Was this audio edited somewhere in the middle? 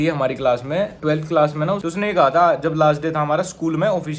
yes; 2 cuts; at 0.9 s, 1.8 s

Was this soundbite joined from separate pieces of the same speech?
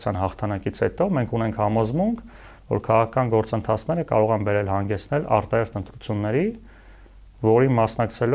no; 0 cuts

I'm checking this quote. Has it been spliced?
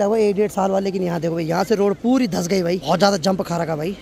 no; 0 cuts

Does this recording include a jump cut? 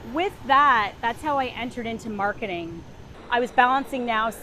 yes; 1 cut; at 3.1 s

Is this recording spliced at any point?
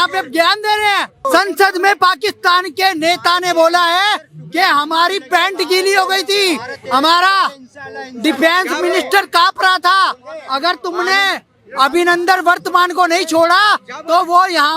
yes; 1 cut; at 1.2 s

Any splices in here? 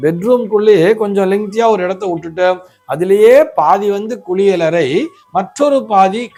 no; 0 cuts

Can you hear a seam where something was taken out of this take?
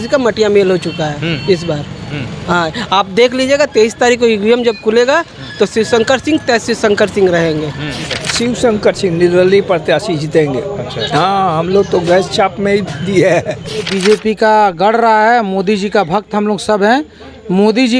yes; 2 cuts; at 8.2 s, 13.9 s

